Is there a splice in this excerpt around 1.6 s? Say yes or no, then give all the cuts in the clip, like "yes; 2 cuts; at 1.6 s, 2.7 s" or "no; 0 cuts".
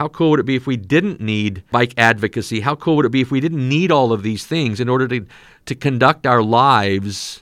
yes; 1 cut; at 1.6 s